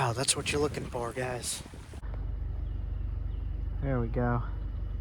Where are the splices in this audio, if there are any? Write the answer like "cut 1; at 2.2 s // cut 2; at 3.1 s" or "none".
cut 1; at 2.0 s